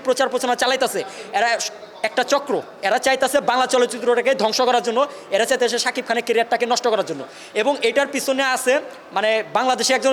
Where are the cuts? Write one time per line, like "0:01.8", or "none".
none